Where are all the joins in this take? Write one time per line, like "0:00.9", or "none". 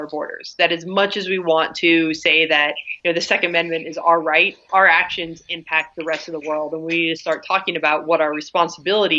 0:02.9
0:04.7